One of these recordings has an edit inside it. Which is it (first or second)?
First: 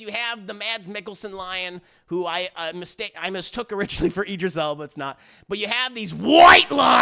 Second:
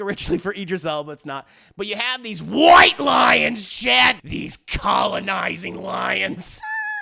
second